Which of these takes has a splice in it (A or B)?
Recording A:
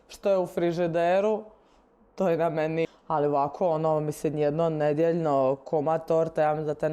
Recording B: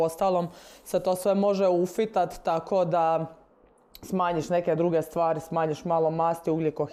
A